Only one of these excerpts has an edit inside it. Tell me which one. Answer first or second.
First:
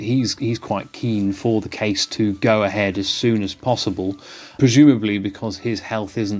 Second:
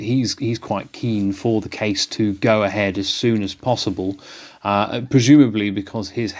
first